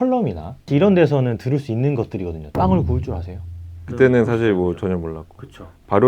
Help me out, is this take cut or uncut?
cut